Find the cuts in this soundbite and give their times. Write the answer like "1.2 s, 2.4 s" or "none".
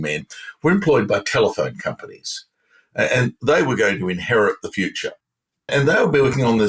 5.7 s